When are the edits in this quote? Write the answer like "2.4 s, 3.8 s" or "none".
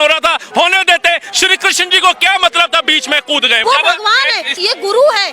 3.6 s, 4.5 s

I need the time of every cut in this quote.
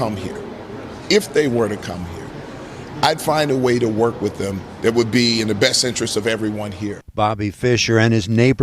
7.0 s

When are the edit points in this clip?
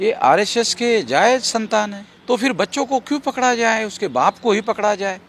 2.1 s

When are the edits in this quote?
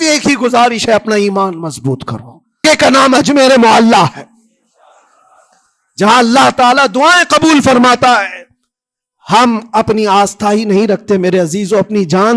2.6 s

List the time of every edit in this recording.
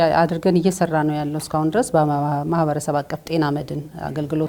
none

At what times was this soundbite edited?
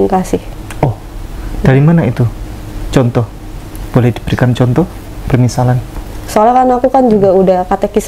6.3 s

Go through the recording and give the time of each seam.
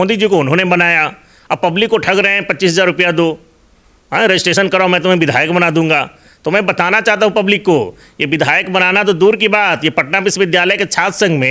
none

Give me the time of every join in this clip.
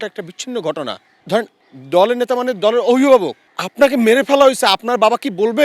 1.4 s

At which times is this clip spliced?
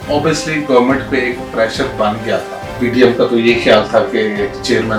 2.7 s

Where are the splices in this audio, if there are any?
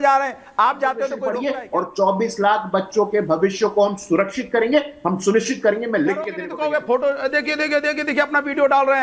1.2 s, 6.4 s

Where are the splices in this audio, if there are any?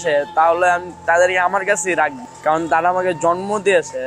2.3 s

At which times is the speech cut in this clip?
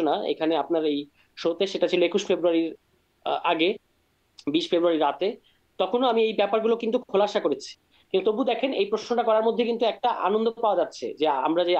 none

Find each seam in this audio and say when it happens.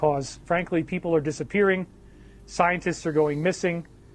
1.0 s

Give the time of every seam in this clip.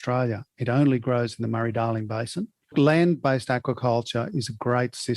2.7 s

